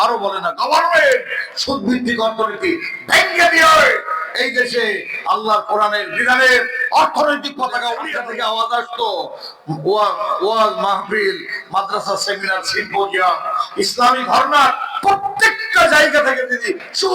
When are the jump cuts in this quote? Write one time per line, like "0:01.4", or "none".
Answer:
0:08.1